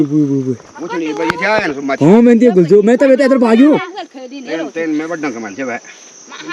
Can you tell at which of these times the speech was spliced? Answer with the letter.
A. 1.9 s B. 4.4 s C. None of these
C